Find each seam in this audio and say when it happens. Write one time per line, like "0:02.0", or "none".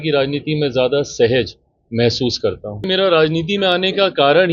0:02.8

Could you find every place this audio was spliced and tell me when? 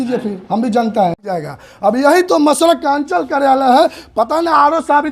0:01.2

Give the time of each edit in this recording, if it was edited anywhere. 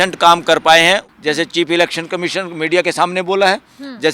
0:01.1

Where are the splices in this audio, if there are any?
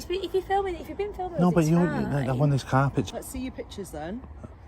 0:03.1

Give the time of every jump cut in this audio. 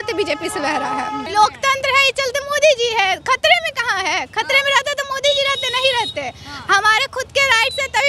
0:01.2

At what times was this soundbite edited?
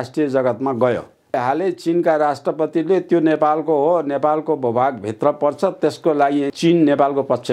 0:01.4
0:06.5

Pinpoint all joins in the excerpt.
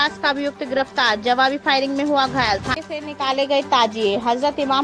0:02.7

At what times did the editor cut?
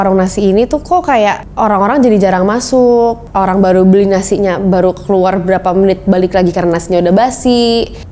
none

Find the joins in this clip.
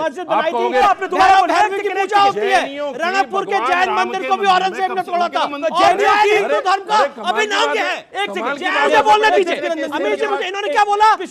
0:00.8
0:08.9

